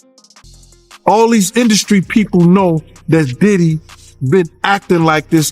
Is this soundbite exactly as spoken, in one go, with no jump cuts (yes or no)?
no